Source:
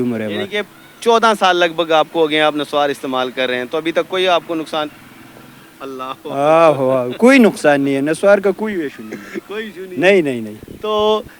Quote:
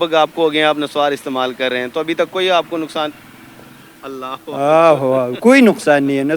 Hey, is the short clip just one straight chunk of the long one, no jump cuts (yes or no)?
yes